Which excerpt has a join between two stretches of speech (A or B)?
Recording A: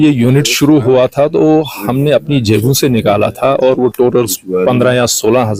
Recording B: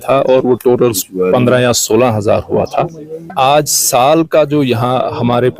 B